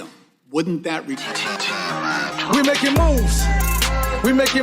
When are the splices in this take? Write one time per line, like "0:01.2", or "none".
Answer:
0:01.2